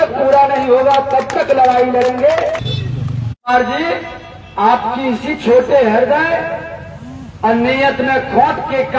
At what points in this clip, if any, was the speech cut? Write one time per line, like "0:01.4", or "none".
0:02.7